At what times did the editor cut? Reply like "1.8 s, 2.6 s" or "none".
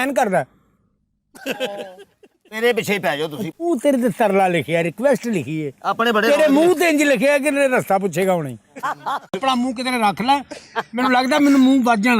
9.4 s